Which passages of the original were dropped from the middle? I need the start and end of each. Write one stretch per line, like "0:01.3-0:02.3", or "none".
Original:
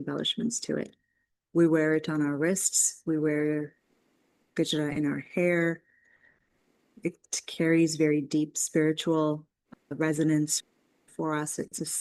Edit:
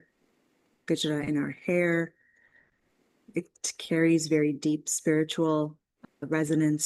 none